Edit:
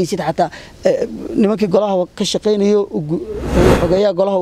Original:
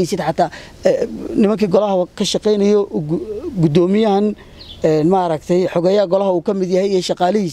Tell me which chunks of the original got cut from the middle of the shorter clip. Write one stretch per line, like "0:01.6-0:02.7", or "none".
0:03.5-0:05.4